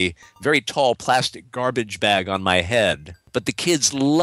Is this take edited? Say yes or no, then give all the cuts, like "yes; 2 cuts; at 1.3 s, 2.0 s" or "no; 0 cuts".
yes; 1 cut; at 3.2 s